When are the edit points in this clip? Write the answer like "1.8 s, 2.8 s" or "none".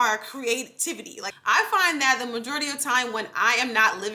1.2 s